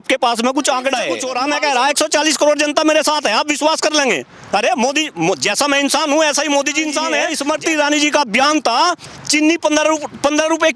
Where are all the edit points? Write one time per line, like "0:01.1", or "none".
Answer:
0:01.3
0:07.3
0:09.1